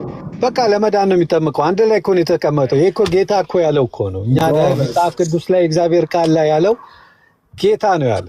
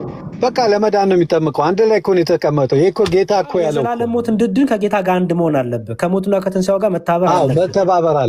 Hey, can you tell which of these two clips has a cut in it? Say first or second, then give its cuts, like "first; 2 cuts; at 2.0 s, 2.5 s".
second; 1 cut; at 3.9 s